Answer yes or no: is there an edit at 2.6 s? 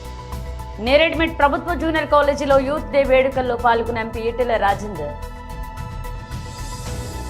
no